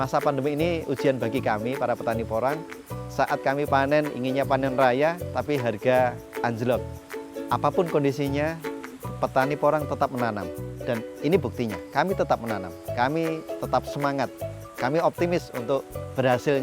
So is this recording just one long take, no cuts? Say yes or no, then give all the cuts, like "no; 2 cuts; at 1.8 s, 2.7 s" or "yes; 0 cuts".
no; 1 cut; at 7.0 s